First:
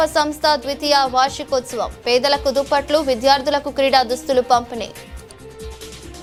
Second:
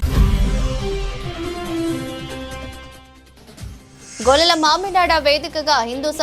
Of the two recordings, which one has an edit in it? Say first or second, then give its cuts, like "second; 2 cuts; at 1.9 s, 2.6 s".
second; 2 cuts; at 2.5 s, 4.0 s